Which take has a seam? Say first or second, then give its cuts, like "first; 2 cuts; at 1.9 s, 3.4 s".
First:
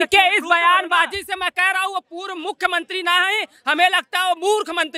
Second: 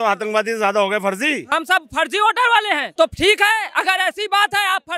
second; 2 cuts; at 1.4 s, 2.9 s